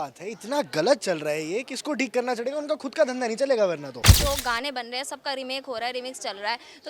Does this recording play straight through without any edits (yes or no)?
no